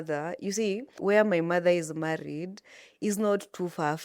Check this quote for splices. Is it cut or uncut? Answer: cut